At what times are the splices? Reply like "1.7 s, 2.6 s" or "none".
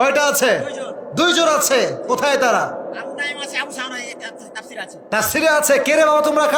none